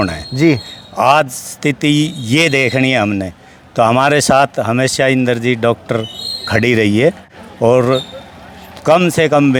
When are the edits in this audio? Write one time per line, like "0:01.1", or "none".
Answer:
none